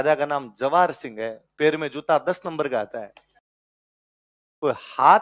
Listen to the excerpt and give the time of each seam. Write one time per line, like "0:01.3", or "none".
none